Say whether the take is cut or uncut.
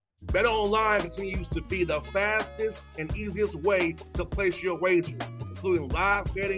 uncut